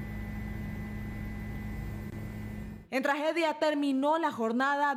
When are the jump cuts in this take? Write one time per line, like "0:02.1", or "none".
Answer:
0:02.7

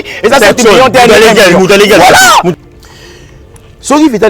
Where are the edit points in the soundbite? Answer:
0:02.5

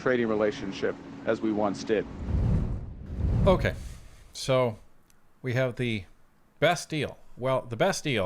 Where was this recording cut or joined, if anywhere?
none

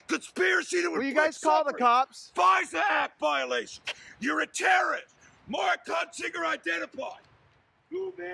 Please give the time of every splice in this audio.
none

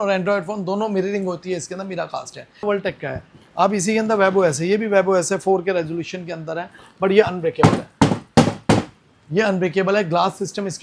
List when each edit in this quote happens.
0:02.6

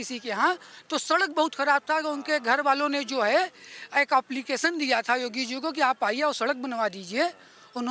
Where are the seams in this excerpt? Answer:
none

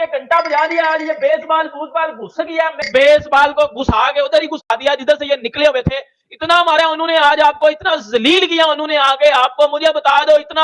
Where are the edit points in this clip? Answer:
none

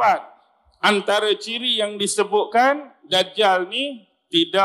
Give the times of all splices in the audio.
none

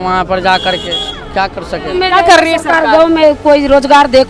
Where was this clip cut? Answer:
0:02.0

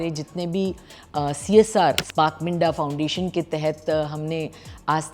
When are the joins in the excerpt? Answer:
0:02.0

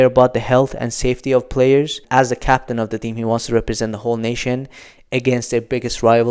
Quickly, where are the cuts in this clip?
0:02.0

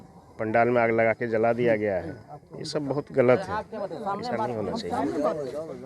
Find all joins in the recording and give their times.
none

